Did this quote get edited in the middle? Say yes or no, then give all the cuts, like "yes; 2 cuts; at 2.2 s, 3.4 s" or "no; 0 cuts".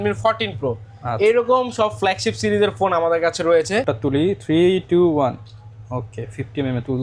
yes; 1 cut; at 3.8 s